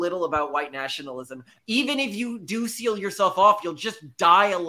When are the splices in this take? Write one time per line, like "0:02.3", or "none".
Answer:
0:01.5

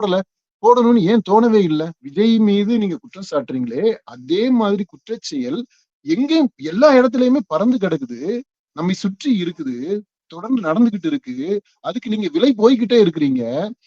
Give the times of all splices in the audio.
0:02.0

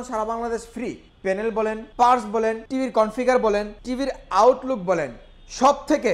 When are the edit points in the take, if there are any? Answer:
0:01.5
0:02.6
0:03.8

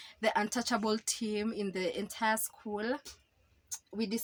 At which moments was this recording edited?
none

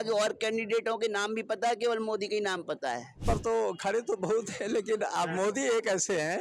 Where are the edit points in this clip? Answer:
0:03.2

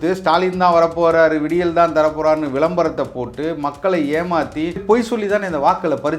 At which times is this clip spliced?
0:04.8

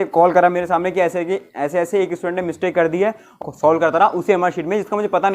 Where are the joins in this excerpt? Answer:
0:03.4

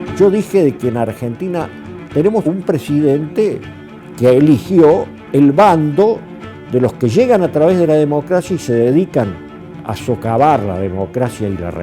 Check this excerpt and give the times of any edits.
0:02.0

